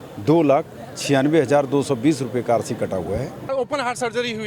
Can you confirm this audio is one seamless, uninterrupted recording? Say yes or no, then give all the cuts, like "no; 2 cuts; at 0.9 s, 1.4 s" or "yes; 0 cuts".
no; 1 cut; at 3.4 s